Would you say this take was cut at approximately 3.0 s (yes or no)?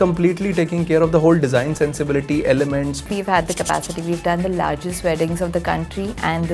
yes